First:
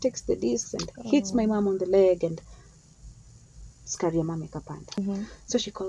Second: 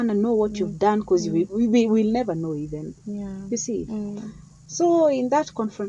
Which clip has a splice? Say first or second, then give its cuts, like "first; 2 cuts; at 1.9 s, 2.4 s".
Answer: first; 1 cut; at 5.0 s